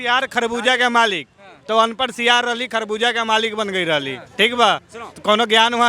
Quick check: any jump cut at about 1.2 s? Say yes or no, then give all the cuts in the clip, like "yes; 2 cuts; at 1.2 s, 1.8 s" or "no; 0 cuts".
no; 0 cuts